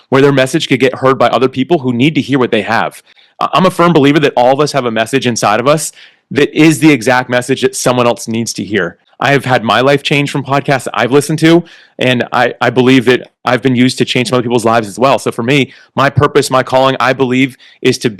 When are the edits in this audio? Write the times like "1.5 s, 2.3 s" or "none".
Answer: 9.0 s

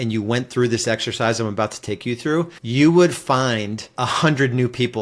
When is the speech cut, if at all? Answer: 2.6 s, 3.8 s

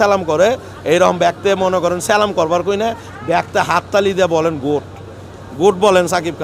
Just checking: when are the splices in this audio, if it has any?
none

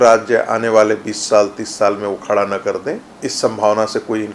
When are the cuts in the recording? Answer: 3.1 s

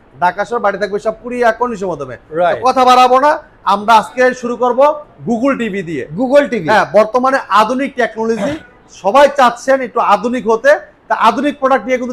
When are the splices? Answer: none

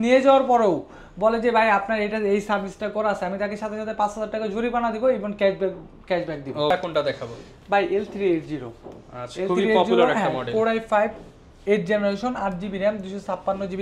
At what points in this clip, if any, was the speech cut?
none

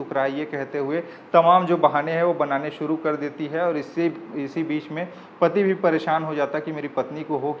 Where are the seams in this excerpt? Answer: none

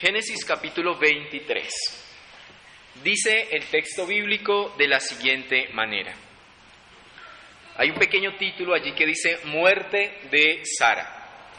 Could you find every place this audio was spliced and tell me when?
8.1 s

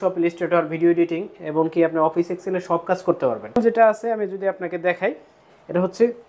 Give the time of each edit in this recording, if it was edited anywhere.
3.6 s

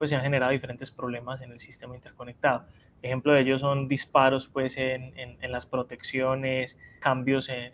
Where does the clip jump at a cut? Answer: 6.8 s

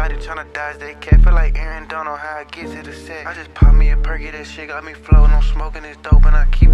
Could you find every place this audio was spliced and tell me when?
none

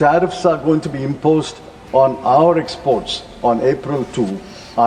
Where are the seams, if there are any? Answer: none

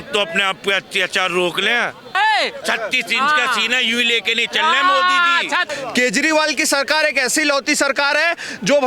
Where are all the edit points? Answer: 2.1 s, 5.7 s

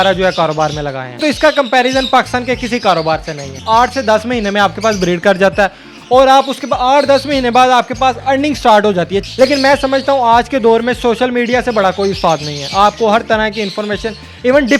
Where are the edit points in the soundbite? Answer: 1.2 s, 3.5 s, 9.2 s

